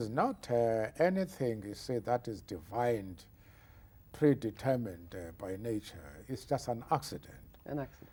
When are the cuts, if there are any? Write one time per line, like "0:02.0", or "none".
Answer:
none